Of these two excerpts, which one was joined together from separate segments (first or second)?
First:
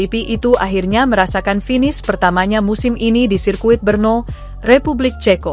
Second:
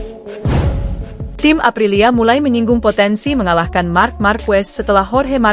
second